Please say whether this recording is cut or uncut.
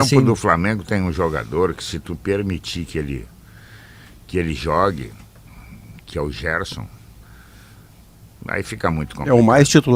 uncut